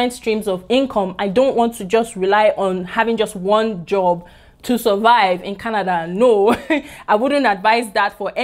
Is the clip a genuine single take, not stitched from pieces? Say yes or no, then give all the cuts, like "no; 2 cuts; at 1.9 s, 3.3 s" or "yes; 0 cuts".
yes; 0 cuts